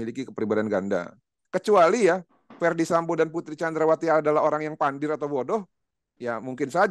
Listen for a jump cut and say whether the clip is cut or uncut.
cut